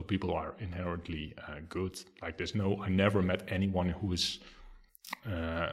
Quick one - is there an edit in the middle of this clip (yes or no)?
no